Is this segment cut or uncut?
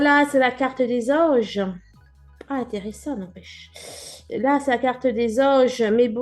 uncut